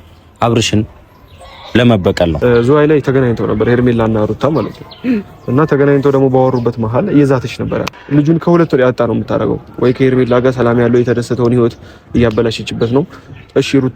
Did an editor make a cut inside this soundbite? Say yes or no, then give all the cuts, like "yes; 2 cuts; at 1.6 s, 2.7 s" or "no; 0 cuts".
yes; 2 cuts; at 2.4 s, 8.0 s